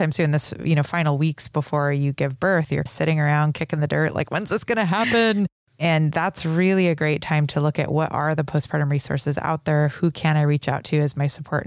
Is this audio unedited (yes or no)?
yes